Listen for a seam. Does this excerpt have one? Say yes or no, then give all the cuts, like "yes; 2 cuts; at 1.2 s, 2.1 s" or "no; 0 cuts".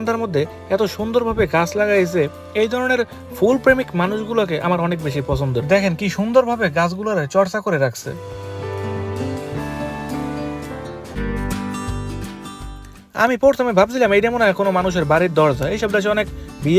yes; 1 cut; at 11.0 s